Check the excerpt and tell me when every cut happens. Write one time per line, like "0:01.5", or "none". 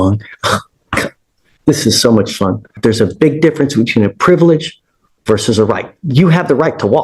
0:02.8